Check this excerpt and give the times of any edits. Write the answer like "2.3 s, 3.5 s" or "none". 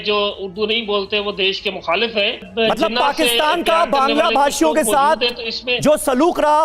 2.5 s